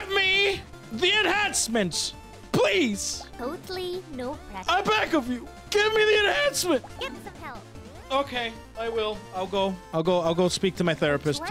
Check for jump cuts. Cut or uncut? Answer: cut